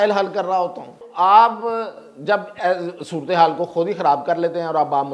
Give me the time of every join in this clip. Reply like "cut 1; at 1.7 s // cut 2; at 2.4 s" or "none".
cut 1; at 1.1 s